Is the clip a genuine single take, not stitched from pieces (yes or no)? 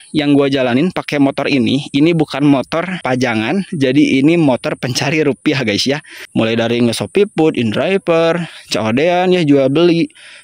no